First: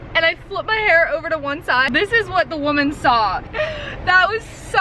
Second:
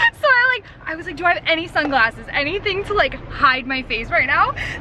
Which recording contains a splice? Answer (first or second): first